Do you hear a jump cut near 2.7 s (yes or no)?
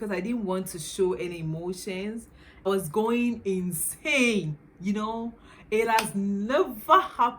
yes